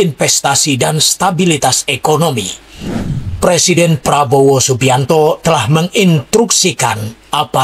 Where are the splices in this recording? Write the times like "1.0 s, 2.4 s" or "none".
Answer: 3.1 s